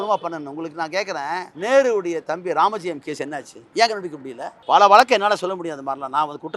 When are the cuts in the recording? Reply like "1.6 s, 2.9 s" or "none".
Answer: 1.5 s, 3.8 s, 4.7 s